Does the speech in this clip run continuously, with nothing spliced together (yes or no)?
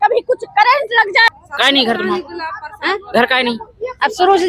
no